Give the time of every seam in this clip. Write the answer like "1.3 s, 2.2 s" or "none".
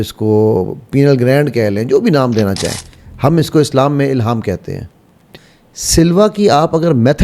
5.4 s